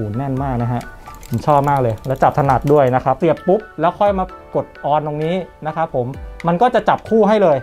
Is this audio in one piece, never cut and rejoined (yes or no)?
no